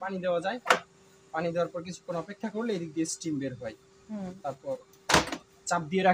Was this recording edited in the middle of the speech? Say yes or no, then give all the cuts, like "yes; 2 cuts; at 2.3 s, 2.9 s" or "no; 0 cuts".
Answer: no; 0 cuts